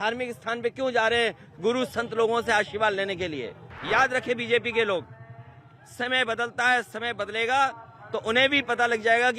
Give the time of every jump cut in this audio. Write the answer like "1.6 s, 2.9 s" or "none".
3.7 s